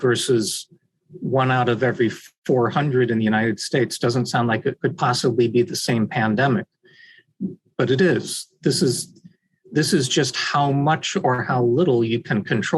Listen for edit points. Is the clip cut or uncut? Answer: uncut